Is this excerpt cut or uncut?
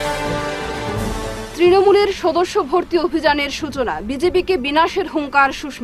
uncut